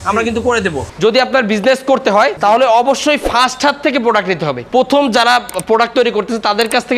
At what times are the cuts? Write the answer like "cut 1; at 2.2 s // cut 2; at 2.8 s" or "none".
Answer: cut 1; at 0.8 s // cut 2; at 2.4 s // cut 3; at 4.6 s